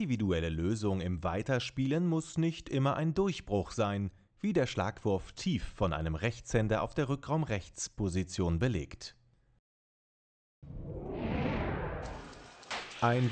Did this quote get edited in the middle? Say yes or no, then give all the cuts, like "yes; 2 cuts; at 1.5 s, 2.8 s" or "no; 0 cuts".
yes; 1 cut; at 11.6 s